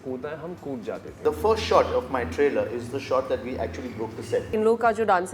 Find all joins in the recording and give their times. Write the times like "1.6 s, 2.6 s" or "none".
1.1 s, 4.5 s

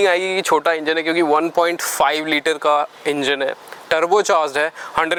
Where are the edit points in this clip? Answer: none

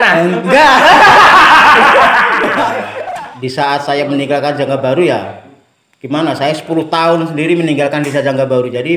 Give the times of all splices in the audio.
2.9 s

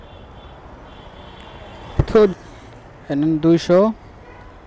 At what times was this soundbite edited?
2.3 s

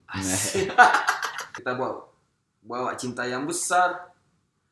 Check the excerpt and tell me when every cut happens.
1.5 s

